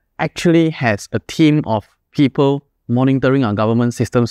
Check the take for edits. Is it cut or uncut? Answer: cut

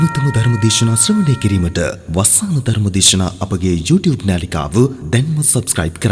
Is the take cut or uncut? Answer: uncut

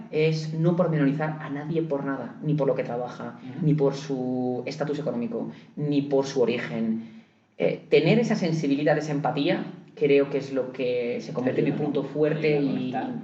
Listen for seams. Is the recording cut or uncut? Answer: uncut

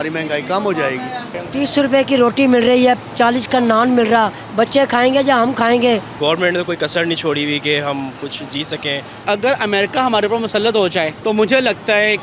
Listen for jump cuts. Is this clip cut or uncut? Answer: cut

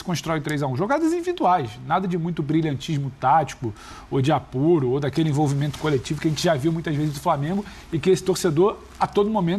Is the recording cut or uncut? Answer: uncut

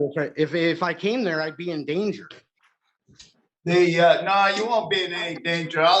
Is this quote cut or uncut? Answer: uncut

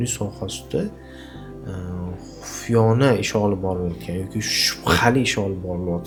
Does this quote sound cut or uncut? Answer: uncut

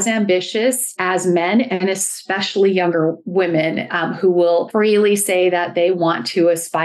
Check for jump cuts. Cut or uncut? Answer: cut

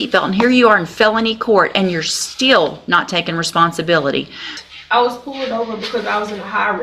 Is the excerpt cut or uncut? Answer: cut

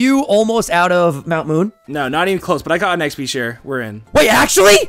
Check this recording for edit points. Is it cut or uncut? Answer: cut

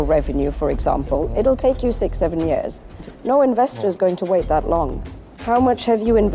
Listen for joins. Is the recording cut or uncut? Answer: uncut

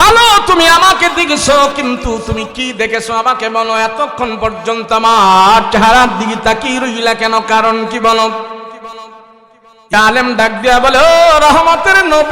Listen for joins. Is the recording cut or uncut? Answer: cut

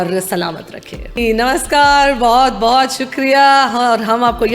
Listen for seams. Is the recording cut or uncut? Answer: cut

